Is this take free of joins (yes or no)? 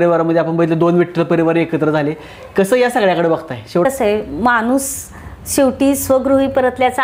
no